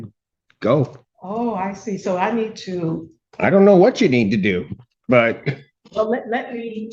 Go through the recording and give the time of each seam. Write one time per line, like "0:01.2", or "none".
0:01.1
0:05.7